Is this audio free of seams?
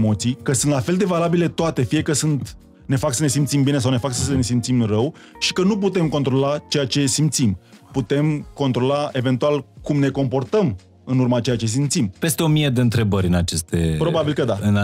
no; 1 cut; at 12.2 s

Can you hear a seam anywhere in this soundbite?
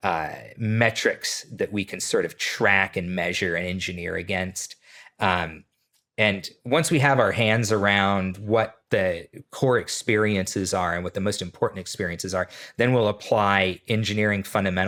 no; 0 cuts

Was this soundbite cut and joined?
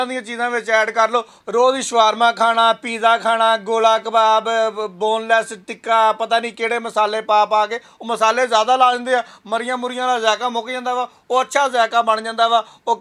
no; 0 cuts

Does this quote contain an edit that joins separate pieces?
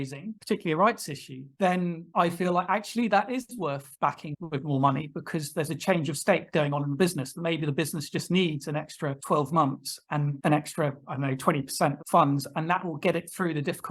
no; 0 cuts

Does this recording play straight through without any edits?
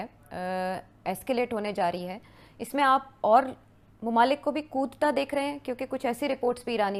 yes; 0 cuts

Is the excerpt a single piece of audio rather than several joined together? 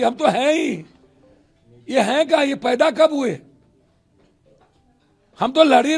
yes; 0 cuts

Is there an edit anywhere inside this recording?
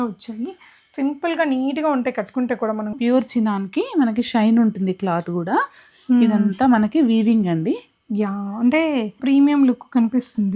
yes; 2 cuts; at 2.9 s, 9.2 s

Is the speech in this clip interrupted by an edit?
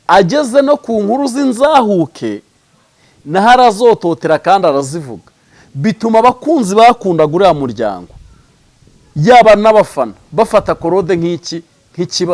no; 0 cuts

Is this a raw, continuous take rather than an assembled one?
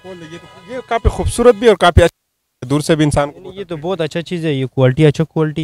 yes; 0 cuts

